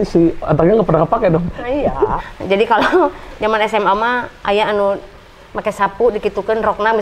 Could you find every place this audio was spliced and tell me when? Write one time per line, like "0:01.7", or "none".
0:02.2